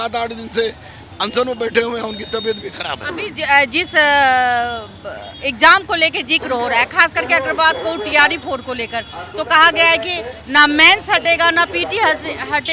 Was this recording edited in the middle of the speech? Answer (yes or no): no